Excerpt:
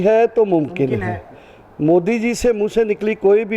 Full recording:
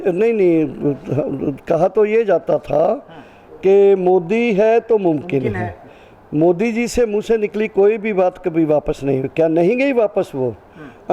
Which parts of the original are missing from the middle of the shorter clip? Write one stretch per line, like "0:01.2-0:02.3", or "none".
none

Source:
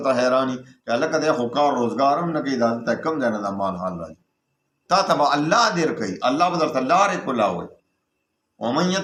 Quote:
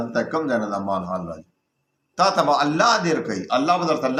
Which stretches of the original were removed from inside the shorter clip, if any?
none

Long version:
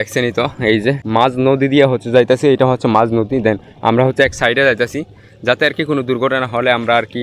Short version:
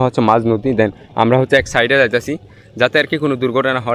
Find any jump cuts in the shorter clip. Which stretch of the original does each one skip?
none

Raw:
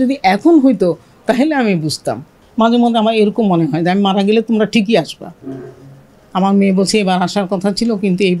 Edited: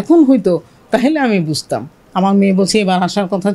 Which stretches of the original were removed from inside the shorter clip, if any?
0:02.3-0:06.2

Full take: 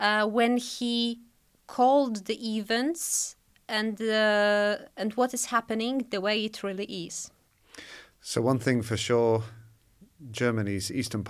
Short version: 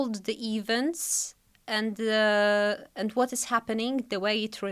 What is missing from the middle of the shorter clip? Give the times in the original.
none

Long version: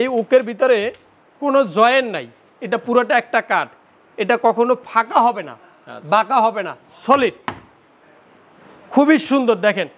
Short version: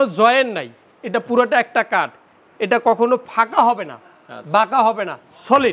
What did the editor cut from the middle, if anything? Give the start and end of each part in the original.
none

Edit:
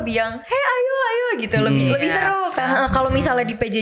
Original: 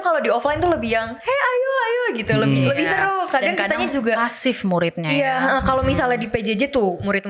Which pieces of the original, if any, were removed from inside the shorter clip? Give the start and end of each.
0:03.3-0:05.3

